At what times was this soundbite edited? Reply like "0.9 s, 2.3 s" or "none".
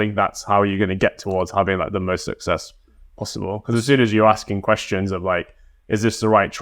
none